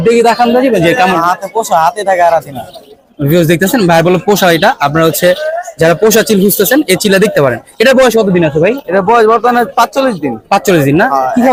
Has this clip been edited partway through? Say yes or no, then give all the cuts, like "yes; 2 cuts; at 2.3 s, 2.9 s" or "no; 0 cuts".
no; 0 cuts